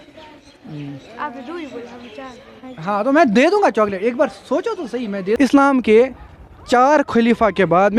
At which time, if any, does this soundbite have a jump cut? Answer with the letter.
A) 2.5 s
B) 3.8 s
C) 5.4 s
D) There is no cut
C